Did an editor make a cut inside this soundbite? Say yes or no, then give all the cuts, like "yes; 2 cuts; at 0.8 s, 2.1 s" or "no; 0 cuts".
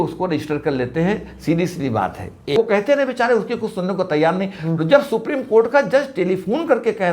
yes; 1 cut; at 2.6 s